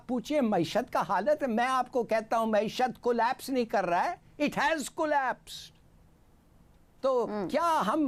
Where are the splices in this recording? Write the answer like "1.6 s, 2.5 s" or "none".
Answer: none